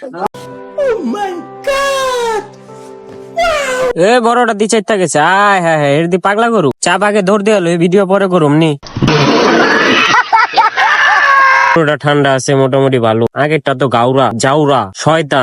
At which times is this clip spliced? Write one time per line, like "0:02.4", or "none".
0:03.9
0:11.8